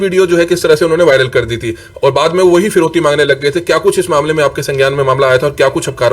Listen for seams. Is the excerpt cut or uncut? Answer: uncut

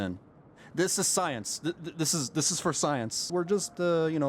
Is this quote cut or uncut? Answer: cut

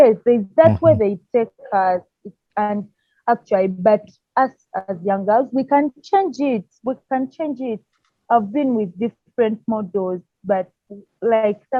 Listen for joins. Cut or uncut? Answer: uncut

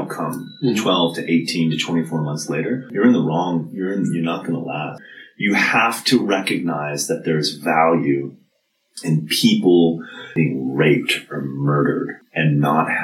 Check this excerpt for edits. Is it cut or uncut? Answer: cut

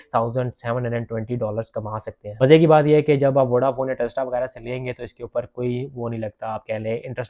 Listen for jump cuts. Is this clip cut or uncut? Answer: cut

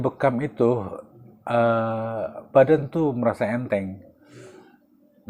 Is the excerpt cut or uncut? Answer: uncut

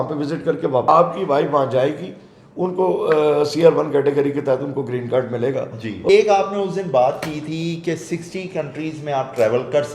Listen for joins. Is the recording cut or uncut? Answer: cut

